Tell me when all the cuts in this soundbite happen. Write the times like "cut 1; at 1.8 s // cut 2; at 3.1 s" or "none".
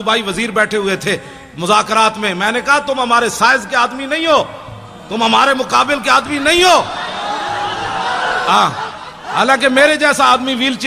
none